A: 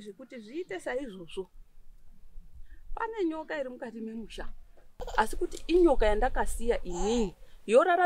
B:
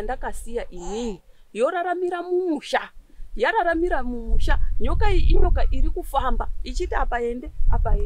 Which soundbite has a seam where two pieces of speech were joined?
A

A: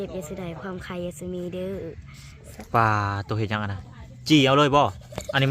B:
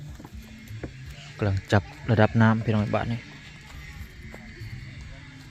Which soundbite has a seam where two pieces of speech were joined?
A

